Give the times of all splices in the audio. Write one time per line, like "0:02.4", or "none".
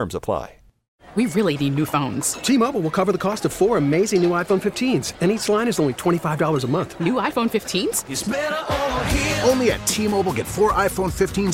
0:01.0